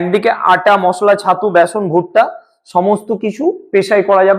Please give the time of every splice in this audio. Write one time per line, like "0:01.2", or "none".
none